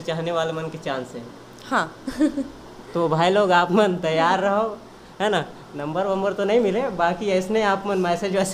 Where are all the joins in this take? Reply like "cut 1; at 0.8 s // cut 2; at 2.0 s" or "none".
none